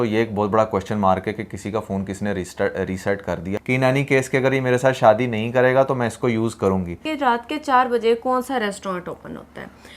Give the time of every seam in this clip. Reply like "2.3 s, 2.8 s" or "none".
3.5 s, 7.1 s